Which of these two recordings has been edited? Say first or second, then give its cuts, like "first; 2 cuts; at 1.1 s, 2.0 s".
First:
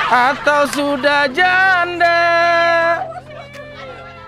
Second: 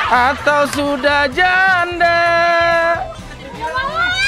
second; 1 cut; at 3.2 s